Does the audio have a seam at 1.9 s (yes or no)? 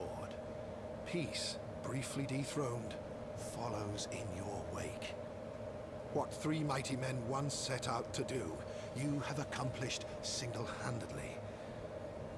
yes